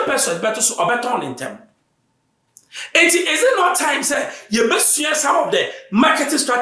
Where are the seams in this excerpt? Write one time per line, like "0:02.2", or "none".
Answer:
none